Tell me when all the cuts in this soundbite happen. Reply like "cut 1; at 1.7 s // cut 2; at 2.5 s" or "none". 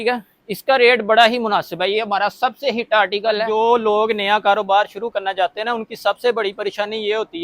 cut 1; at 3.5 s